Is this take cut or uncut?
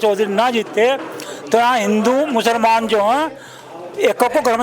uncut